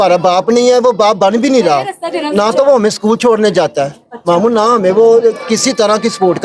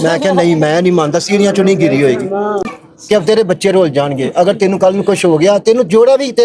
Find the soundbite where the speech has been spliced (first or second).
second